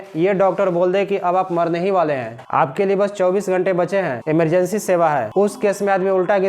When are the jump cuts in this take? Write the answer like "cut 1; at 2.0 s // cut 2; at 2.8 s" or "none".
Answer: cut 1; at 2.3 s // cut 2; at 4.2 s // cut 3; at 5.3 s